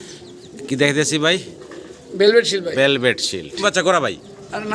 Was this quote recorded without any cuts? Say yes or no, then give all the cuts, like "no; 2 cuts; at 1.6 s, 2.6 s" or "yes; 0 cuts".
no; 1 cut; at 3.6 s